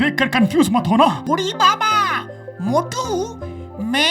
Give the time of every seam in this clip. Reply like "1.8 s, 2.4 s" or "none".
1.2 s